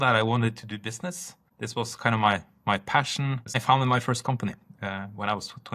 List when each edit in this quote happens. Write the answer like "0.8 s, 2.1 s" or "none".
3.6 s